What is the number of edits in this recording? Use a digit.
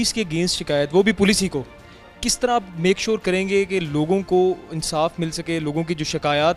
0